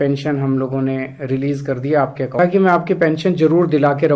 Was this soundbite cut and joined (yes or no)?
yes